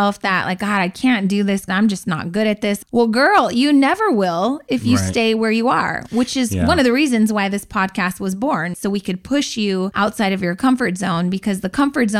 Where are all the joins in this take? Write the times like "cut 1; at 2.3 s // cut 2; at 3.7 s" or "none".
cut 1; at 1.7 s // cut 2; at 2.8 s // cut 3; at 8.7 s // cut 4; at 9.9 s